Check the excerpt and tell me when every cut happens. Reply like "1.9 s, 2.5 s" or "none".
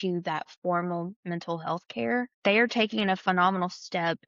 2.3 s